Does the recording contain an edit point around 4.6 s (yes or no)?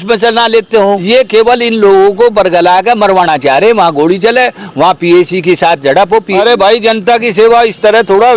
no